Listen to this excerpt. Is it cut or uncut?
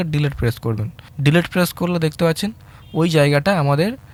uncut